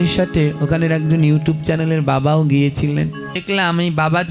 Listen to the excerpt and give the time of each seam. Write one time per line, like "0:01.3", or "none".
0:03.4